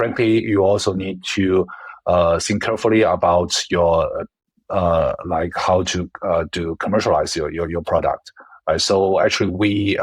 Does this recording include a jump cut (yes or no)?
no